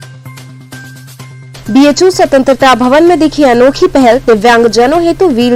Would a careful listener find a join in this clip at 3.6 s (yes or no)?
no